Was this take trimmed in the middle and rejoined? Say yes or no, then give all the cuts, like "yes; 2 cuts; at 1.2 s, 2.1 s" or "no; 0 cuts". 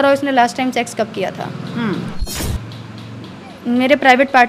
yes; 1 cut; at 2.3 s